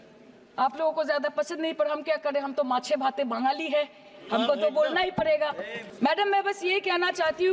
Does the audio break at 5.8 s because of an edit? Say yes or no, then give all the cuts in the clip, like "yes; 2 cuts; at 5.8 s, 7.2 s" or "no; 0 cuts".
yes; 1 cut; at 5.8 s